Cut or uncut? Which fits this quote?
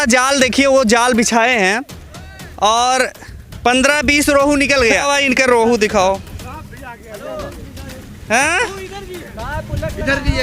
cut